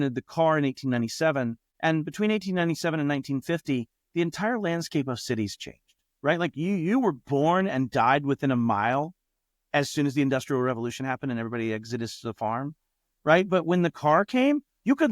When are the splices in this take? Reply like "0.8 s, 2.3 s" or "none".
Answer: 1.6 s